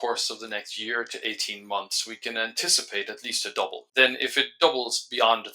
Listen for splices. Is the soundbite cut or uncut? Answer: cut